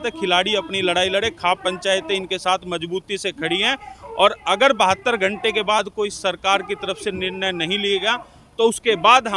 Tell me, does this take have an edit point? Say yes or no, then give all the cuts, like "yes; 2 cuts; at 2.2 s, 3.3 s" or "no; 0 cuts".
no; 0 cuts